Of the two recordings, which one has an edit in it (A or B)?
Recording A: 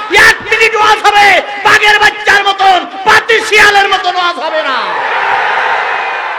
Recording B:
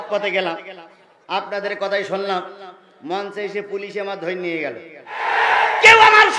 B